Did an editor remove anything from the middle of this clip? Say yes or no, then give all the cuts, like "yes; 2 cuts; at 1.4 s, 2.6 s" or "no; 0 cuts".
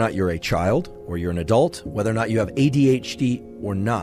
yes; 1 cut; at 1.0 s